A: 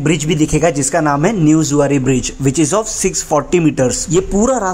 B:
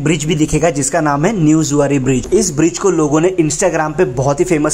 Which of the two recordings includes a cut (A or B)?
B